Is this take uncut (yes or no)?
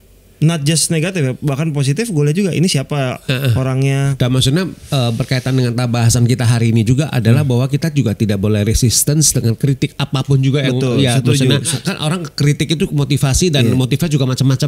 no